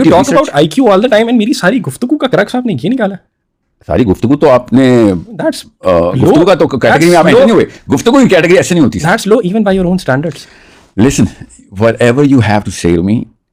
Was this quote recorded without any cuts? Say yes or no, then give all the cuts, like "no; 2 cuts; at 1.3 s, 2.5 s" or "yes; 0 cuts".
yes; 0 cuts